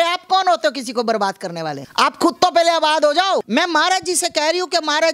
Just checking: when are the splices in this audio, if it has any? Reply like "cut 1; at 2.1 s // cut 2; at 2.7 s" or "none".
cut 1; at 1.8 s // cut 2; at 3.5 s